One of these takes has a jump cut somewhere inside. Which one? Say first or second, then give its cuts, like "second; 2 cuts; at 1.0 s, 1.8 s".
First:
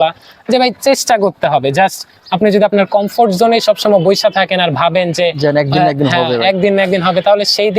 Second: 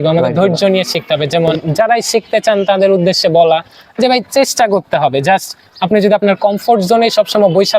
second; 1 cut; at 1.6 s